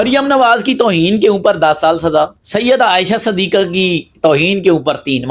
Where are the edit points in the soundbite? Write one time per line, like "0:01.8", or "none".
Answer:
0:02.4